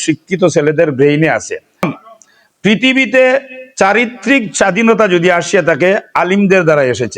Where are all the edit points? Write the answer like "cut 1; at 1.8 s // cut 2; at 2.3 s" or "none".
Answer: cut 1; at 1.9 s